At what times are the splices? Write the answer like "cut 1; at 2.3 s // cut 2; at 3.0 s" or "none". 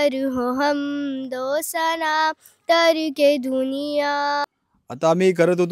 cut 1; at 4.4 s